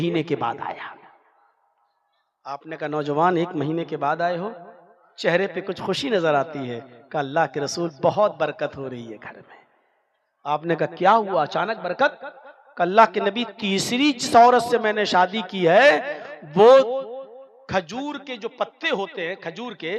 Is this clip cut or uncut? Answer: uncut